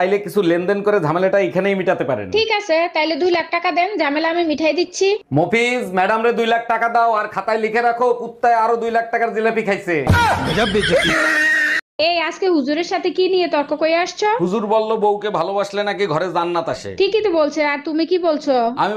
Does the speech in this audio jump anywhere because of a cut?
yes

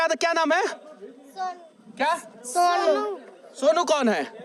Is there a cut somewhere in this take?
no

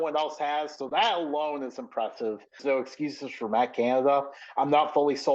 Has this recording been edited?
yes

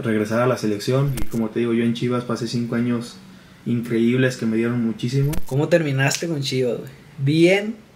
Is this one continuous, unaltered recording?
no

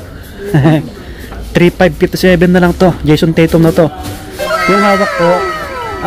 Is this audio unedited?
yes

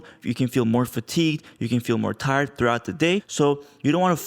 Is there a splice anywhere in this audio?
yes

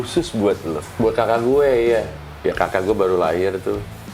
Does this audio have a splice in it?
yes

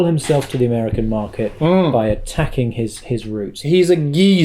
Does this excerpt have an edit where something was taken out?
yes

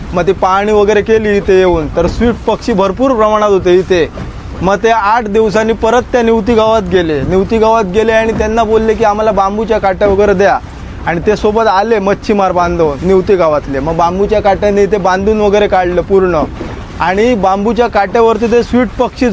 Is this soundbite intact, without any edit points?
yes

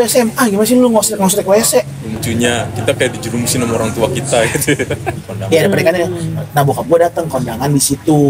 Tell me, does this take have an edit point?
yes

